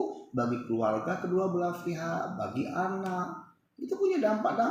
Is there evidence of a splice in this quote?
no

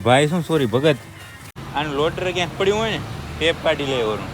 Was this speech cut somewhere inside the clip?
yes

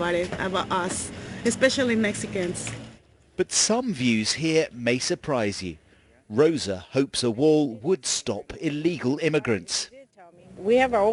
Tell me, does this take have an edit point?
no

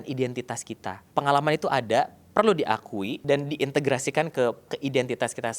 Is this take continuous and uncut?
no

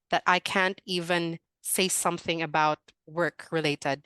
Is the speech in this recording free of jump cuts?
no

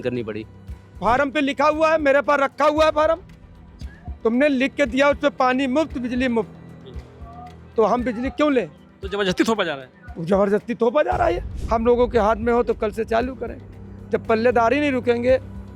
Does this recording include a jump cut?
yes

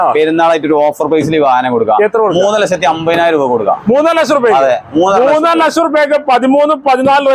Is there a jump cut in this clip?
no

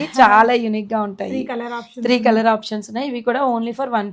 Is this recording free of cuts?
yes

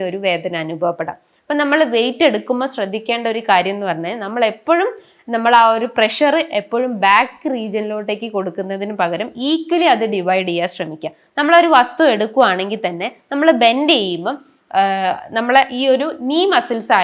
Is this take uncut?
yes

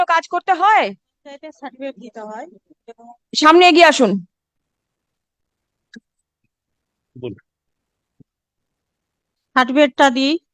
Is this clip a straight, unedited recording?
yes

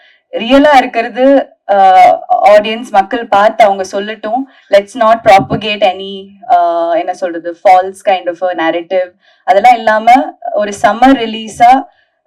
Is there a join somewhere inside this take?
no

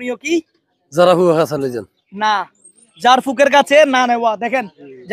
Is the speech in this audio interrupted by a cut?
no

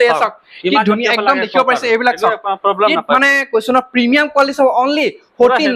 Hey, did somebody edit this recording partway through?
no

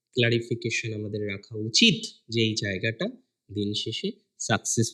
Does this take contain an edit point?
no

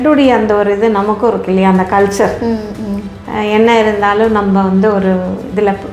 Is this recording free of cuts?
yes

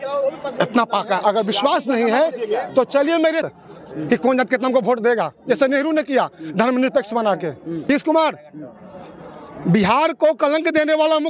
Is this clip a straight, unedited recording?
no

